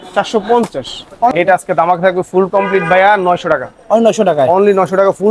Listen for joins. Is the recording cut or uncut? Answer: cut